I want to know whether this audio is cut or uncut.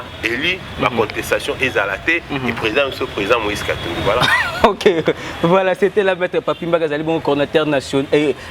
uncut